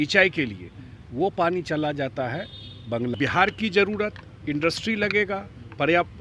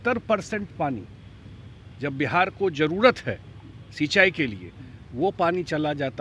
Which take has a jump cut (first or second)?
first